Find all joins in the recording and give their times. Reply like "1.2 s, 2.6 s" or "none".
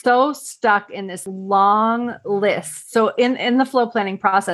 1.2 s